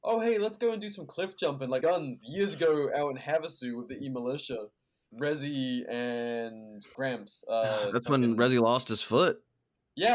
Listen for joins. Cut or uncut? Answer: cut